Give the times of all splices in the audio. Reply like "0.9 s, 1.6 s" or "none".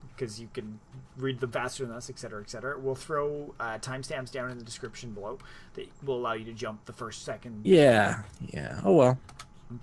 none